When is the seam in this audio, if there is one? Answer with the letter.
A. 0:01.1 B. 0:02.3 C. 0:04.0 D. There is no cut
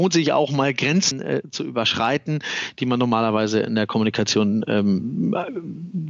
A